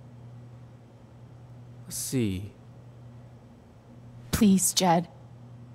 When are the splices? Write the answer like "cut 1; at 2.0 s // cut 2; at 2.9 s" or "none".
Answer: none